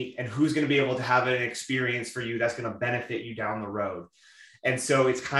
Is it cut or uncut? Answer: uncut